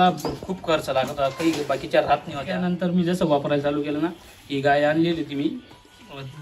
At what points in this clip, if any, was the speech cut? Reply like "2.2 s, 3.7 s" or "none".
2.7 s